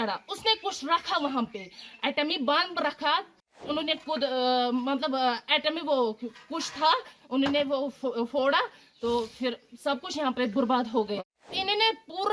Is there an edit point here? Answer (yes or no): yes